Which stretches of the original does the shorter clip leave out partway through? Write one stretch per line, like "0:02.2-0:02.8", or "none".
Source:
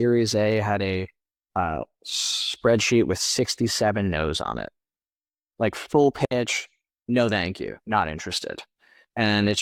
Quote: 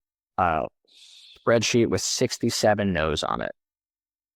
none